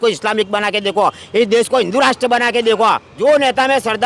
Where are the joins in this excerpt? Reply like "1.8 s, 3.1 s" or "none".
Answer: 3.1 s